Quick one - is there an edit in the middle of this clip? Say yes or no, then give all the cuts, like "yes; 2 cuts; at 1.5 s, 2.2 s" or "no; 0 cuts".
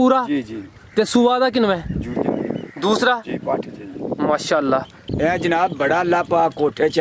yes; 1 cut; at 5.1 s